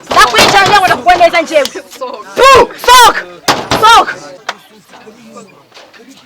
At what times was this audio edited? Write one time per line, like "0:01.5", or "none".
0:04.4

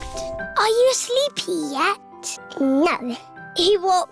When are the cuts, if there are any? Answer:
0:02.9

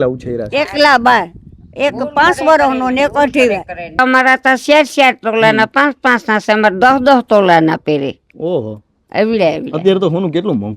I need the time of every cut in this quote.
0:04.0

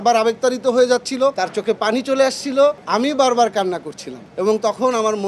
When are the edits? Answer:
none

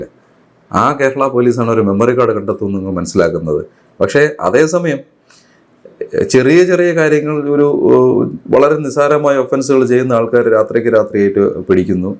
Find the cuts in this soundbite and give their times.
none

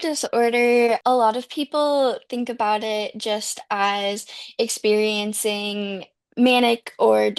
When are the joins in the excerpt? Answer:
0:01.0

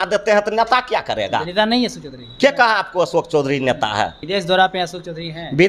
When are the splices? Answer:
0:04.2

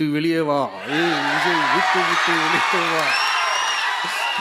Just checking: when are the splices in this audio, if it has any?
none

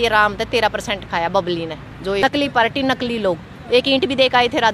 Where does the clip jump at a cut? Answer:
0:02.2

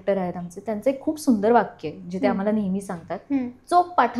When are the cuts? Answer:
none

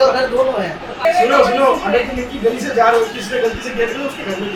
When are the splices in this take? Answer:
none

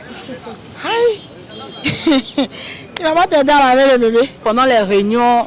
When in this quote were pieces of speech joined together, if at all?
0:04.3

